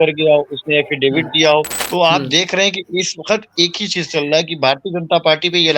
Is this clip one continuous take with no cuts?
no; 1 cut; at 1.8 s

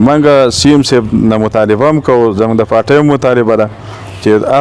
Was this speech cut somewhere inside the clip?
no; 0 cuts

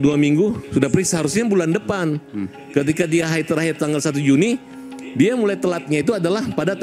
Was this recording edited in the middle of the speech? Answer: no; 0 cuts

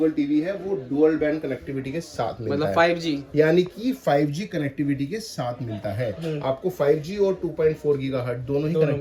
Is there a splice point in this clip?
no; 0 cuts

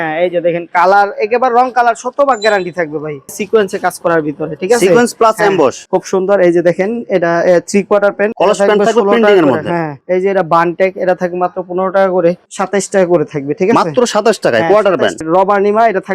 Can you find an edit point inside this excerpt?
yes; 5 cuts; at 3.3 s, 5.8 s, 8.3 s, 12.4 s, 15.2 s

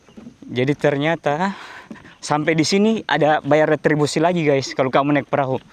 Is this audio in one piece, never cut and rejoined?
yes; 0 cuts

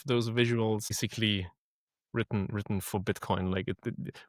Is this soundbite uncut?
no; 1 cut; at 1.0 s

